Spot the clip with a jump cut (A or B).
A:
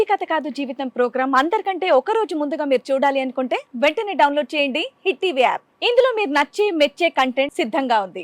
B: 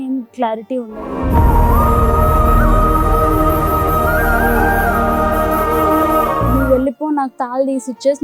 B